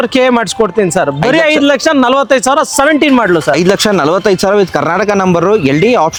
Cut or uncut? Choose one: uncut